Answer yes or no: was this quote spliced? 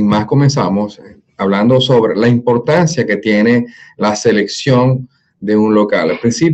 no